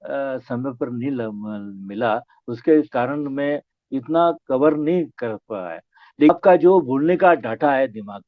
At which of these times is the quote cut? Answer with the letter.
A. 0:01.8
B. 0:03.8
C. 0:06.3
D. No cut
C